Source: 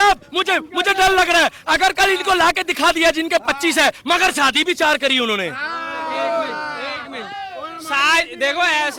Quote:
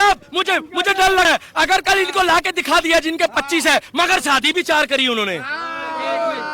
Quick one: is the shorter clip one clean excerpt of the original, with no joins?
no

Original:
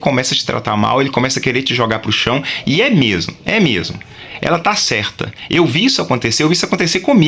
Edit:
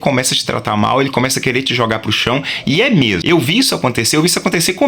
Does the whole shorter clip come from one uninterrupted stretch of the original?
no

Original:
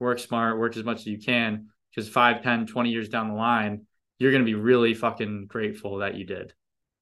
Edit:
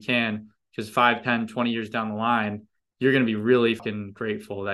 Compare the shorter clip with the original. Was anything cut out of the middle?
yes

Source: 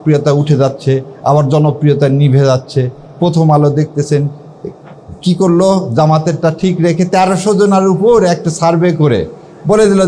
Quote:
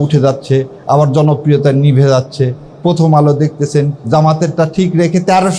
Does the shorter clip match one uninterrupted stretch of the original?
no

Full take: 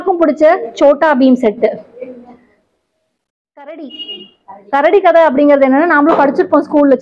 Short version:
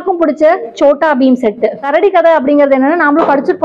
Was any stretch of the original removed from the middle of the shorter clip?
yes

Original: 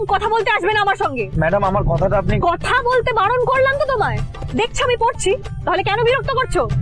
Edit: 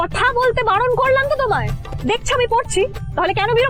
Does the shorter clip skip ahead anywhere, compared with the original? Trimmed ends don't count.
no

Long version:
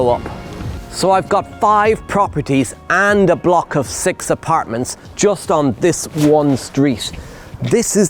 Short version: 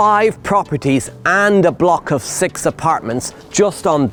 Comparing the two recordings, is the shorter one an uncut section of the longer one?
yes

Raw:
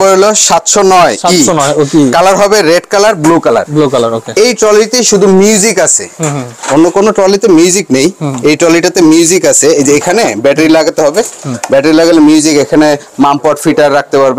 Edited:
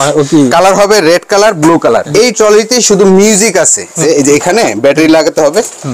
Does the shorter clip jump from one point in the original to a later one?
yes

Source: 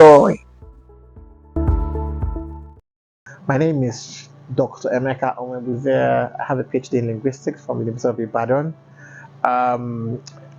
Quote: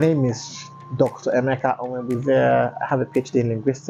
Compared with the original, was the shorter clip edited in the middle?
no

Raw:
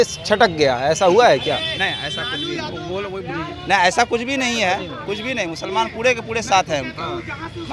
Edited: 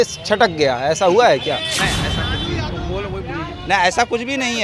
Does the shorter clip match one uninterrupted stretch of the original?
yes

